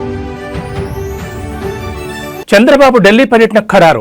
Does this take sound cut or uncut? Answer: cut